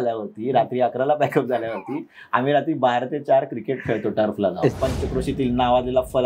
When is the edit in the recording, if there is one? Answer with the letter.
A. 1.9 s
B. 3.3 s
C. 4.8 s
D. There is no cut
C